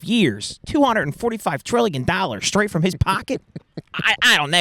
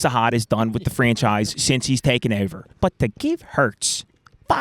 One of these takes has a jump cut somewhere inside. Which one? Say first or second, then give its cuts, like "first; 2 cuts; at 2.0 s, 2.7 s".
second; 1 cut; at 2.6 s